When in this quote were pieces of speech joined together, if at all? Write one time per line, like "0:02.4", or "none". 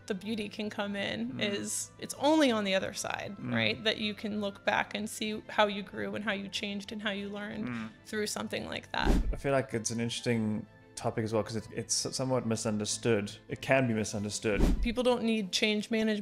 0:02.0
0:09.2
0:14.8